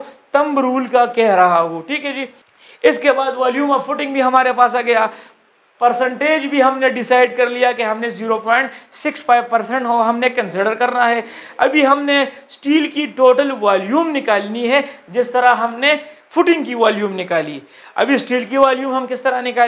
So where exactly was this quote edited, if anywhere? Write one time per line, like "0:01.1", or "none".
none